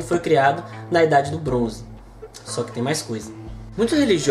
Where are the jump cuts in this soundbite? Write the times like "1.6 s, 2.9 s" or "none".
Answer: none

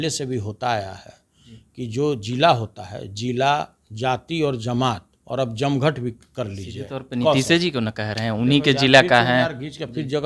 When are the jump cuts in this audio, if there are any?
none

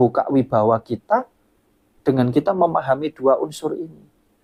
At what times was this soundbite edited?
none

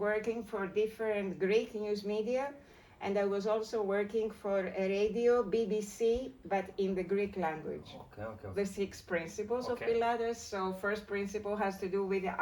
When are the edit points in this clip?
8.5 s

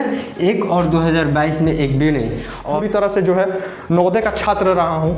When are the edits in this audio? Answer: 2.7 s

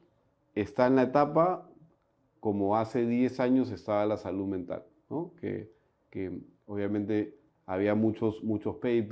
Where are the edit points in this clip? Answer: none

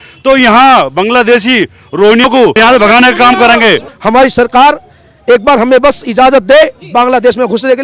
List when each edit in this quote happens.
3.9 s

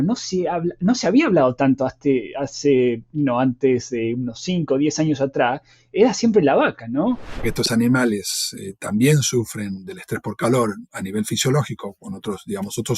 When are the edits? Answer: 7.4 s

